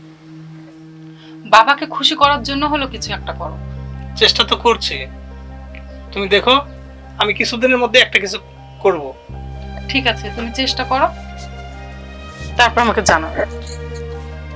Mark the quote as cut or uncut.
cut